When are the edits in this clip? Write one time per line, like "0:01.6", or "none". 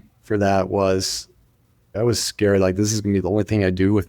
0:01.9